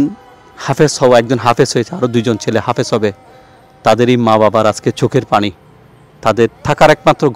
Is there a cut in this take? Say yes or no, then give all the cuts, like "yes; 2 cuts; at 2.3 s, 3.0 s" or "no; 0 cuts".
no; 0 cuts